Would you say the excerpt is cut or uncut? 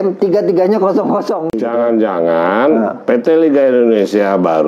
cut